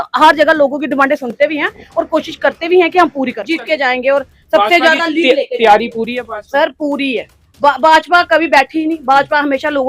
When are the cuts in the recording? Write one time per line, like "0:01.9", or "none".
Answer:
0:03.5